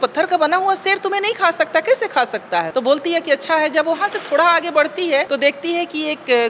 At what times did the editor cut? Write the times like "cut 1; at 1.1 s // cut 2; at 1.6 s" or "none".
cut 1; at 2.7 s // cut 2; at 5.3 s